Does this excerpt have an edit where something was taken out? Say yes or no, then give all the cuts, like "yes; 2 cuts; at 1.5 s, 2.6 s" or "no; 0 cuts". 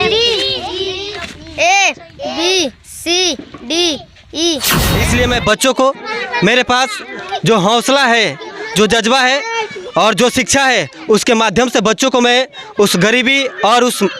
yes; 1 cut; at 4.9 s